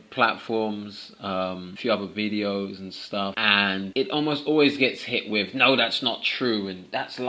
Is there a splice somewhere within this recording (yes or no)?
no